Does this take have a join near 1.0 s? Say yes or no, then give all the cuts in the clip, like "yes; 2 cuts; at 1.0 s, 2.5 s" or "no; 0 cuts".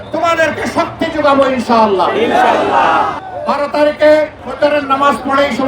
no; 2 cuts; at 3.2 s, 4.4 s